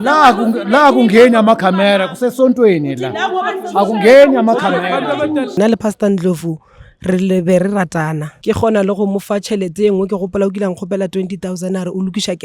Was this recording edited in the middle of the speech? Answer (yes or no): yes